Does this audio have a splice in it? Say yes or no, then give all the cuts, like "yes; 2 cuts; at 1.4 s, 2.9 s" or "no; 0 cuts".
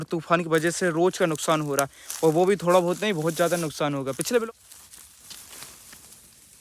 yes; 1 cut; at 4.4 s